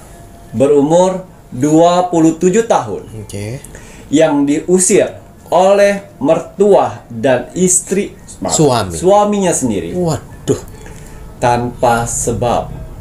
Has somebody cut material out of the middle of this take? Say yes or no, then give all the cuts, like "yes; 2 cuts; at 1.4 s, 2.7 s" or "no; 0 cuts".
no; 0 cuts